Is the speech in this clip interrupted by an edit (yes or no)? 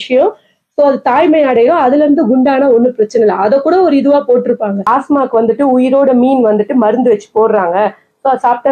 yes